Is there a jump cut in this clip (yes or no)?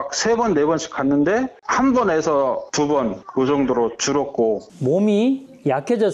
yes